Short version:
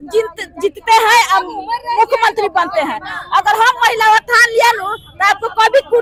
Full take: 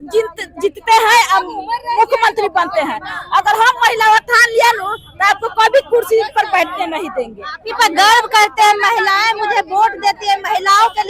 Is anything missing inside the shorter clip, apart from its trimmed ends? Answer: no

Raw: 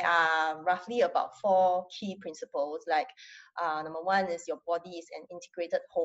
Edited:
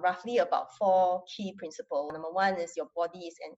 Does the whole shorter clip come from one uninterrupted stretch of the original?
no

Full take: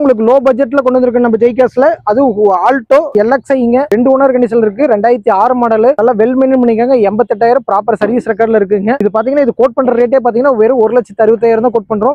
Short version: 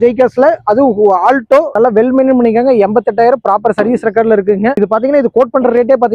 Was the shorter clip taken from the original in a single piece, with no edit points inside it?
no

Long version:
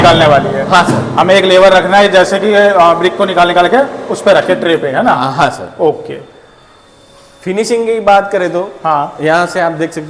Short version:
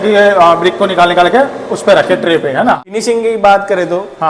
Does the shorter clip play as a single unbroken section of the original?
no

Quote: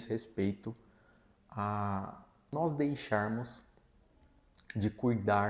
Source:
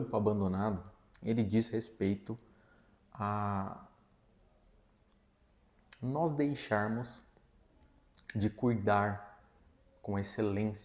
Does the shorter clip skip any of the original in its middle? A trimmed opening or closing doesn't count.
yes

